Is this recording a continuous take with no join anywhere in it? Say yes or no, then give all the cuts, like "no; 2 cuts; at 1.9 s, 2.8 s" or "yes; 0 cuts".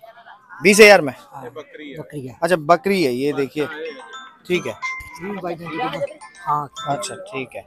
yes; 0 cuts